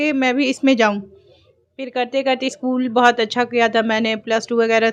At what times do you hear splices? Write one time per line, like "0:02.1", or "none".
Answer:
none